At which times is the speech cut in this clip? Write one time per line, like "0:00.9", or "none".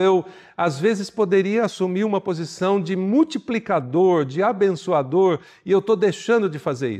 none